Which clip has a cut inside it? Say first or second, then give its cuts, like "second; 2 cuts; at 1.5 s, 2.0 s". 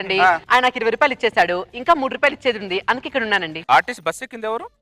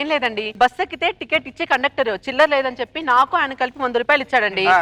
first; 1 cut; at 3.6 s